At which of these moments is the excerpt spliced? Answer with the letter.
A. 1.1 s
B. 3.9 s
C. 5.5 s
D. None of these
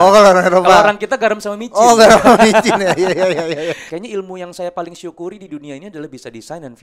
B